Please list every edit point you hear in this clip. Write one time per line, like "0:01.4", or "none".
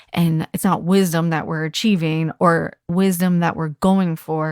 0:02.9